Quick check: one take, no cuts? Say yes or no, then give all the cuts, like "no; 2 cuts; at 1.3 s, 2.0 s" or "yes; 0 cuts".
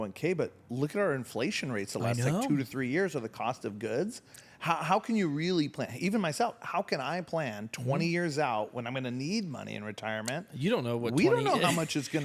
yes; 0 cuts